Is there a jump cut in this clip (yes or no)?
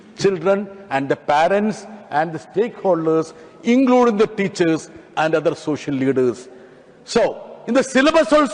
no